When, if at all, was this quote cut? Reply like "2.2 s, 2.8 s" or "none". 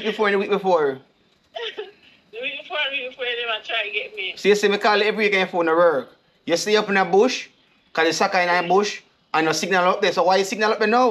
none